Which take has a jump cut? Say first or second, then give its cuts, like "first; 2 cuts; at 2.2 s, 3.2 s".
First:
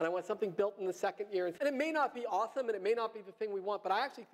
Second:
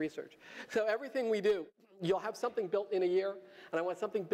first; 1 cut; at 1.5 s